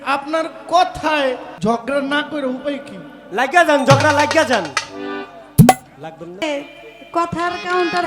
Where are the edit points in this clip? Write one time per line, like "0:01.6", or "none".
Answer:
0:01.5
0:06.4